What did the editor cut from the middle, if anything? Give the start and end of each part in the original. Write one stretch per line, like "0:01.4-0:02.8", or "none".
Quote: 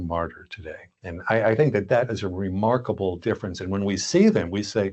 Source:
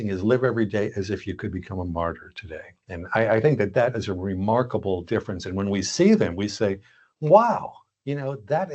none